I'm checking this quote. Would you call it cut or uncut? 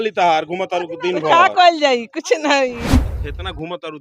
cut